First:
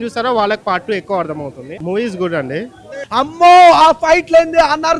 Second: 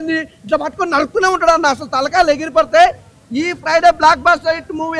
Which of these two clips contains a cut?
first; 2 cuts; at 1.7 s, 3.0 s

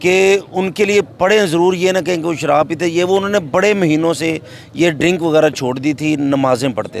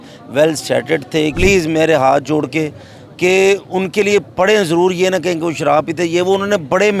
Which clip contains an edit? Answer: second; 1 cut; at 1.3 s

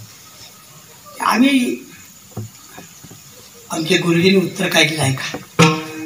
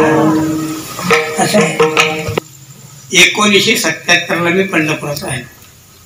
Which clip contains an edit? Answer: second; 1 cut; at 2.3 s

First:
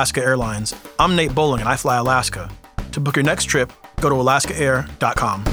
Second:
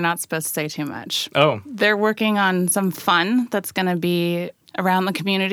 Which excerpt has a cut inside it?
second; 1 cut; at 4.6 s

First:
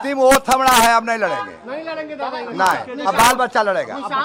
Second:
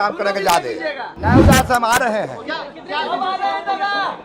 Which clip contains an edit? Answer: second; 1 cut; at 1.1 s

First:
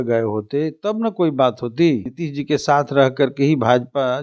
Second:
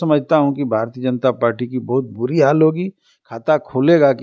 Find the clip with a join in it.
first; 1 cut; at 2.2 s

